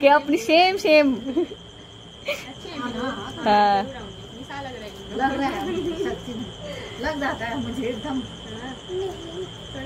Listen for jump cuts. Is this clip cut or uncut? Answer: uncut